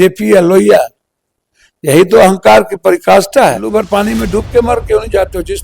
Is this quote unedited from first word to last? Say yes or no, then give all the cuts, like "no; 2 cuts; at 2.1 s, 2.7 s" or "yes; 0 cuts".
no; 1 cut; at 3.6 s